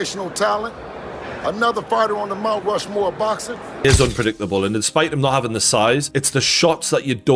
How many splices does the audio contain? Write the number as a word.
one